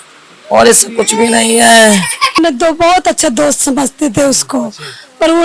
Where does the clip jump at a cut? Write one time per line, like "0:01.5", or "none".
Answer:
0:02.4